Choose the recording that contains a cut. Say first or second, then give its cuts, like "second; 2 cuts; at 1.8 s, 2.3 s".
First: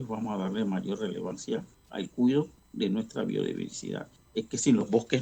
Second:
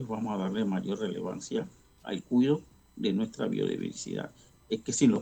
first; 3 cuts; at 1.5 s, 2.6 s, 4.1 s